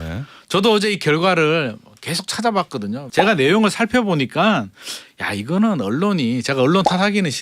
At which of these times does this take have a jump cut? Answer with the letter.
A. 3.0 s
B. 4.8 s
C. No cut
A